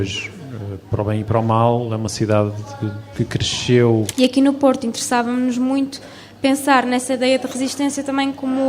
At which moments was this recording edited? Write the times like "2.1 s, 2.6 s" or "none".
4.1 s